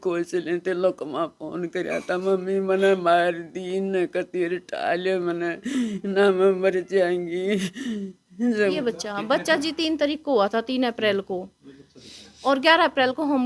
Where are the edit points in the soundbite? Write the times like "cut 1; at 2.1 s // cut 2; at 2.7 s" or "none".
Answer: cut 1; at 8.8 s